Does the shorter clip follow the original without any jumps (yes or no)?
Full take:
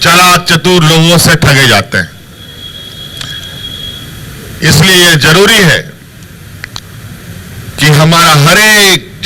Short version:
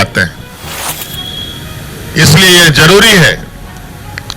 no